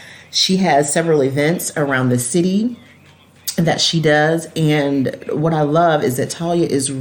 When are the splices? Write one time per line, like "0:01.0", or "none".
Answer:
none